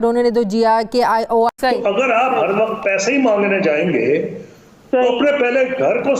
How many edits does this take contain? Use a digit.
1